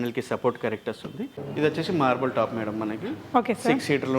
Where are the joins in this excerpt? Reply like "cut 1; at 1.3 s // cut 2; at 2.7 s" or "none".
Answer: cut 1; at 1.3 s